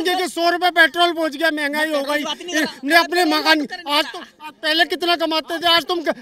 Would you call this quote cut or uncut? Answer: uncut